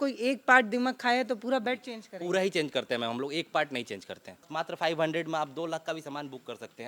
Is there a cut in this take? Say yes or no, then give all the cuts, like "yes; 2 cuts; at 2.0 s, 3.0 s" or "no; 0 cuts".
yes; 1 cut; at 4.4 s